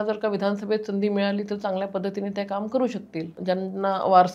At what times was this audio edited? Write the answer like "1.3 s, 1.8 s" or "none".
3.3 s